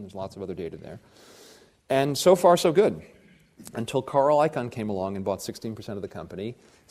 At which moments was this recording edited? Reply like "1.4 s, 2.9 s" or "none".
none